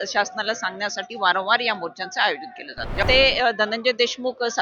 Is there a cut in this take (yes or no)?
yes